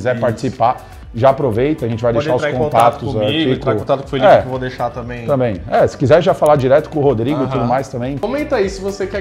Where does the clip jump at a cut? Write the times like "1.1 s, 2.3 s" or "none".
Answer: 8.2 s